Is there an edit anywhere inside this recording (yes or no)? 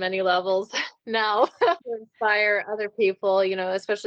yes